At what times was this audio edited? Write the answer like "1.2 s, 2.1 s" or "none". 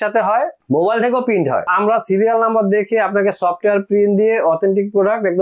1.7 s